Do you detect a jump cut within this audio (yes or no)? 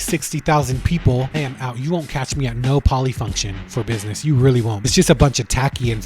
yes